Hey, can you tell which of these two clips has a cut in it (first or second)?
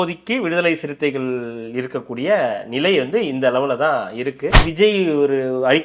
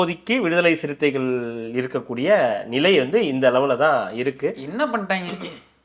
first